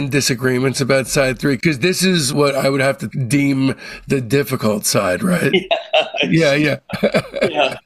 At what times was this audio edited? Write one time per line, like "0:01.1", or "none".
none

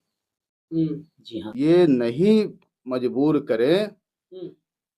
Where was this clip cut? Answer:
0:01.5

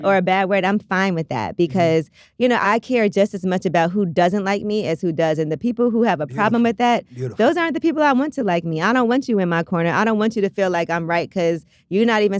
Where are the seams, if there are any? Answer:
0:02.6

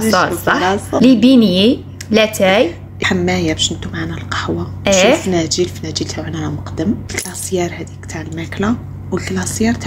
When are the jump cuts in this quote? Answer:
0:01.0
0:03.0
0:07.1

